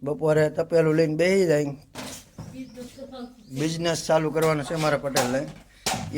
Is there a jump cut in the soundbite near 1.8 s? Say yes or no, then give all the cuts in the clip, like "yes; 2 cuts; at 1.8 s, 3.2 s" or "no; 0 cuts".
yes; 1 cut; at 1.8 s